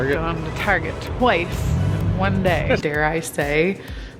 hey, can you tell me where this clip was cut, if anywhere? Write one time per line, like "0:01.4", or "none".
0:02.8